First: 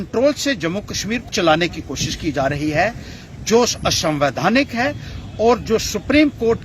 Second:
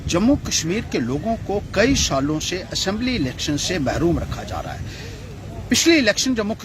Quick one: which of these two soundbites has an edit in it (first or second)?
first